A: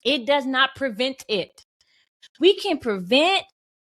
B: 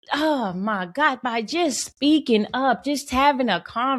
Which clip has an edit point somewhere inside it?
A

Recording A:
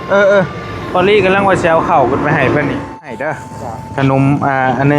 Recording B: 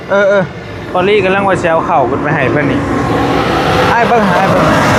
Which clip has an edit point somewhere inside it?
A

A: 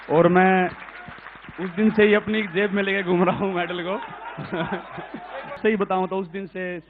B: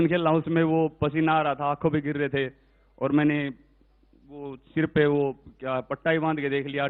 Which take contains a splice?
A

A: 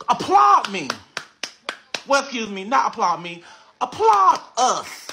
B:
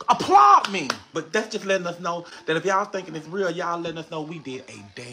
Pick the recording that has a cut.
B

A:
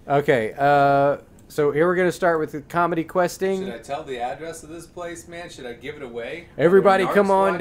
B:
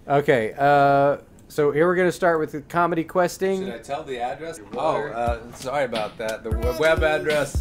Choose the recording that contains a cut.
A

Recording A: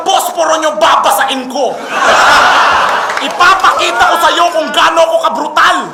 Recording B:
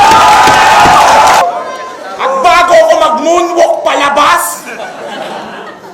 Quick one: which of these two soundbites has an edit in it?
B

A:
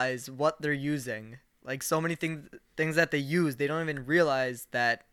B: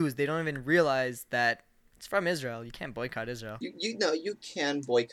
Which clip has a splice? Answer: B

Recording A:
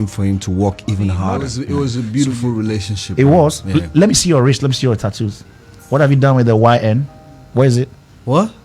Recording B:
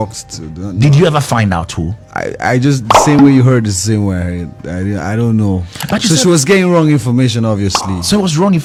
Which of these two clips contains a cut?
A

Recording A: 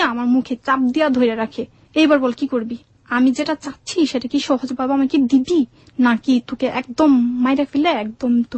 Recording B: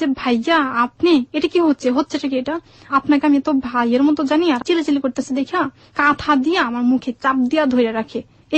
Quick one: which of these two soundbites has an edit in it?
B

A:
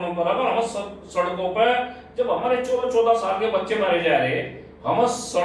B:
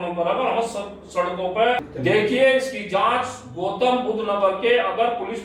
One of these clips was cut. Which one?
B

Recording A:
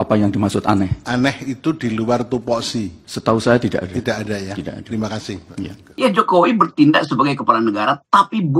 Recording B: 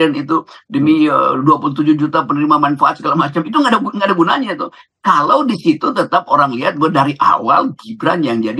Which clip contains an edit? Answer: A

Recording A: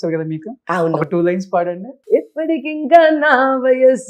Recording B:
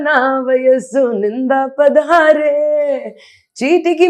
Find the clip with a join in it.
A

